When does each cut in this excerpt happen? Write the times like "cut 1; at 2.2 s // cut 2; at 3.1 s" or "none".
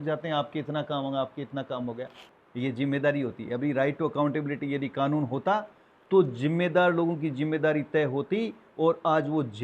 cut 1; at 2.2 s